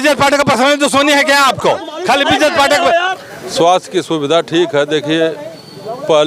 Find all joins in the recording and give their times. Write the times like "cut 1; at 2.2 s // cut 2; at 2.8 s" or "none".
cut 1; at 3.2 s